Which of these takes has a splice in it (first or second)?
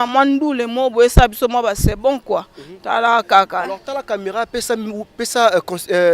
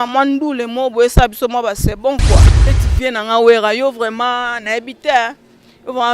second